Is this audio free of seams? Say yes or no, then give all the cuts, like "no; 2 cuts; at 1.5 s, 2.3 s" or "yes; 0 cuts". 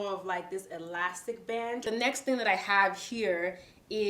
no; 1 cut; at 1.8 s